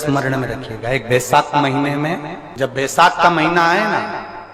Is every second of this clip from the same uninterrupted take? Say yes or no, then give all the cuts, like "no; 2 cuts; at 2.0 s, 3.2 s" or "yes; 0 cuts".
no; 1 cut; at 2.4 s